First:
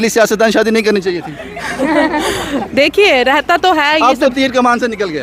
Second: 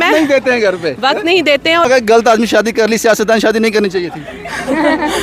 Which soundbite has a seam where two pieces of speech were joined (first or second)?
second